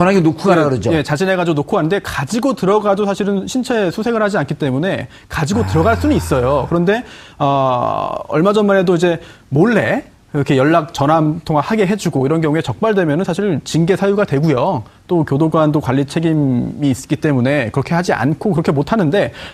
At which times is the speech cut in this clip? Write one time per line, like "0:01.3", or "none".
0:03.9